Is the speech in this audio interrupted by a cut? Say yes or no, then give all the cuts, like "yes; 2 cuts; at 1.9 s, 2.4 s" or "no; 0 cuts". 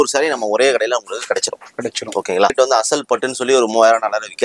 yes; 1 cut; at 2.5 s